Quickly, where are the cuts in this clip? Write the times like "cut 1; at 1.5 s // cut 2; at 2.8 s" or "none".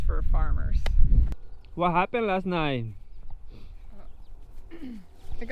cut 1; at 1.3 s